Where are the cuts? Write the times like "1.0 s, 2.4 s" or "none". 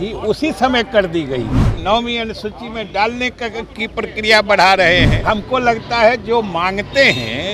1.8 s, 5.1 s